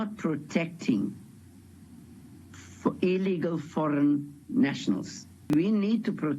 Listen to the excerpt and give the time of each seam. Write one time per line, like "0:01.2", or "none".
0:05.4

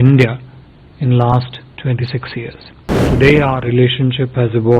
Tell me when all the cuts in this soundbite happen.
0:02.7

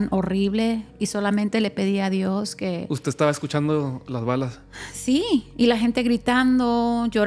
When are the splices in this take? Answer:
none

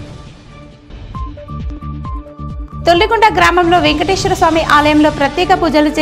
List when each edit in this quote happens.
0:02.5

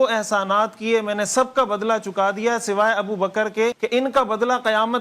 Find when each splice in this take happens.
0:03.8

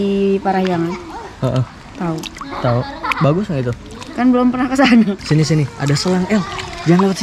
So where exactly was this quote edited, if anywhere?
0:05.2

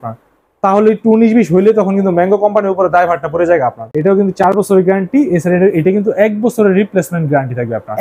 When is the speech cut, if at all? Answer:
0:03.8

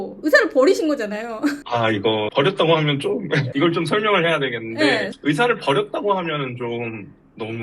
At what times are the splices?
none

